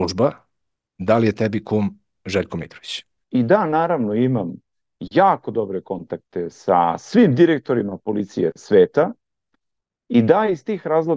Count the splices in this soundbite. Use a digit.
1